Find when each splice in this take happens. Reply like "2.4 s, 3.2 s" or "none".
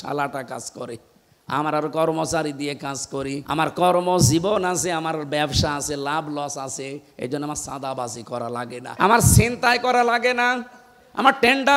3.4 s, 8.9 s